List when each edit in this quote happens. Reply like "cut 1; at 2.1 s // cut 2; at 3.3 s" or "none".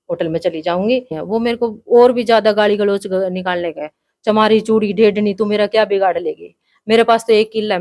cut 1; at 1.2 s